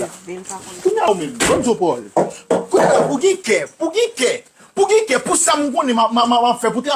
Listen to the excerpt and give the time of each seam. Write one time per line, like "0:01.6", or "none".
0:01.1